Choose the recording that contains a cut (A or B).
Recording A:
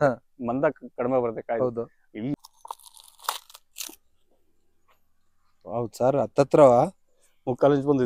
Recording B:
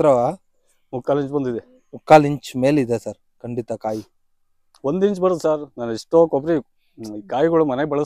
A